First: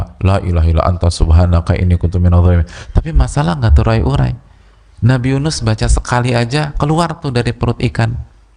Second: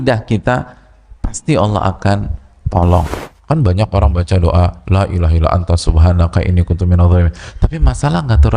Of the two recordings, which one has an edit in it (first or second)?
second